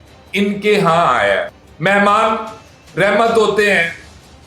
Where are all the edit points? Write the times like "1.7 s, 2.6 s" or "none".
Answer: none